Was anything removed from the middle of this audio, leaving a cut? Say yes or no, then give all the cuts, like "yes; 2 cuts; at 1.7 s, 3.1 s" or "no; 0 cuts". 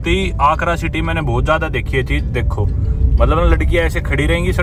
no; 0 cuts